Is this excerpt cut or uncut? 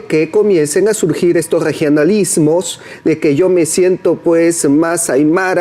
uncut